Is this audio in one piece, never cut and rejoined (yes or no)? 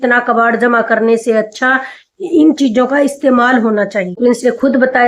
no